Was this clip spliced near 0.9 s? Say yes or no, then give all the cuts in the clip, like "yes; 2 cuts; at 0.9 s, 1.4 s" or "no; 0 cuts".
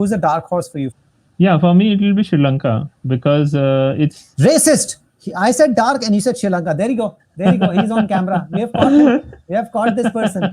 yes; 1 cut; at 0.9 s